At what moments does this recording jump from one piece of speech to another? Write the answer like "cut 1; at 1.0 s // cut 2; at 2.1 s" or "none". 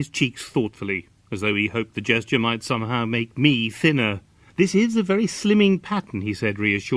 none